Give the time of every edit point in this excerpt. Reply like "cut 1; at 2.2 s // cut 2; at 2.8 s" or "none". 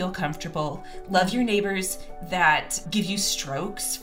cut 1; at 2.8 s